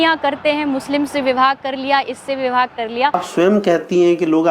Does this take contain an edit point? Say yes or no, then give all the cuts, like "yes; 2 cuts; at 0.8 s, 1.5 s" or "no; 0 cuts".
yes; 1 cut; at 3.2 s